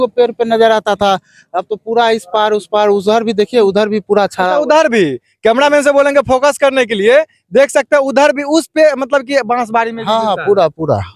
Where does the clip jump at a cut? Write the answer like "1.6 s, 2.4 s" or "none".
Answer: none